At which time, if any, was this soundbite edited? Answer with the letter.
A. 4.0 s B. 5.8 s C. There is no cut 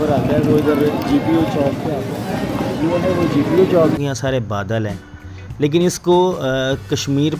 A